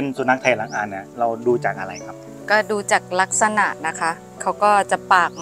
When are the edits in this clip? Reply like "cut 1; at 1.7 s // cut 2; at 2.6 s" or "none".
none